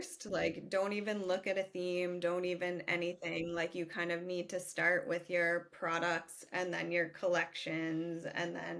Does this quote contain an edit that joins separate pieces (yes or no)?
no